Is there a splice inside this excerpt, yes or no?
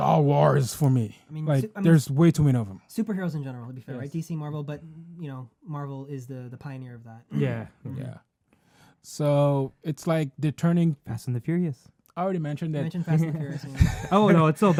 no